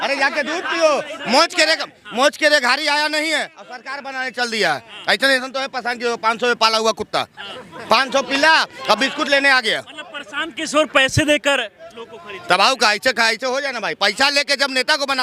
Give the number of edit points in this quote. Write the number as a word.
zero